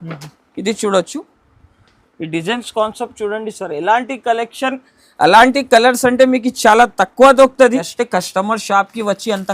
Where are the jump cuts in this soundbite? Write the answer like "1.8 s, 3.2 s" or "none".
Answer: 7.9 s